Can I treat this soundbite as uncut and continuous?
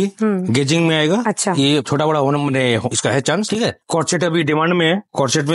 yes; 0 cuts

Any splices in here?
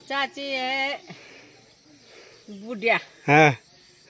no; 0 cuts

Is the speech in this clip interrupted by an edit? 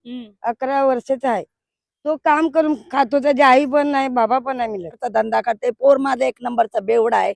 yes; 1 cut; at 5.0 s

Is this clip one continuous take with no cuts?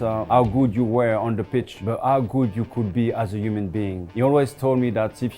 no; 2 cuts; at 1.8 s, 4.0 s

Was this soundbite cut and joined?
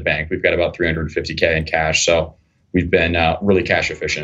no; 0 cuts

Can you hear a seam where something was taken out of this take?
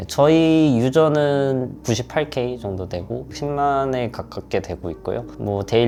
no; 0 cuts

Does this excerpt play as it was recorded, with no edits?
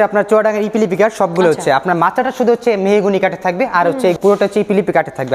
no; 1 cut; at 4.1 s

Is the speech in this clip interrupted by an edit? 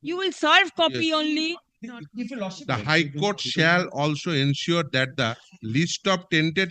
yes; 1 cut; at 2.6 s

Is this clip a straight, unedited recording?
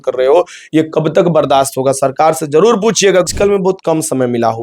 no; 1 cut; at 3.3 s

